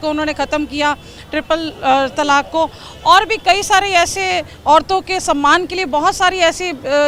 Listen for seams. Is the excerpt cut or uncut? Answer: uncut